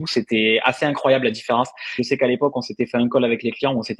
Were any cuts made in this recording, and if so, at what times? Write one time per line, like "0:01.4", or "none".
0:01.9